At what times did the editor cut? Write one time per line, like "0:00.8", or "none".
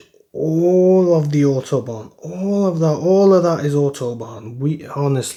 none